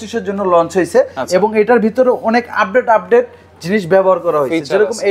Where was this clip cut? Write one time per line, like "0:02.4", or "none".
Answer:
none